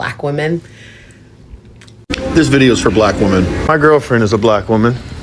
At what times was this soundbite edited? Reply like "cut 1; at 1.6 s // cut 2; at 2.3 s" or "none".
cut 1; at 1.9 s